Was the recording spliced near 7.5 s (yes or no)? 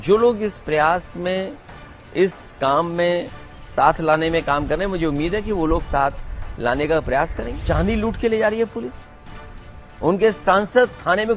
yes